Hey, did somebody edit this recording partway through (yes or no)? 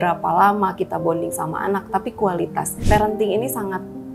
yes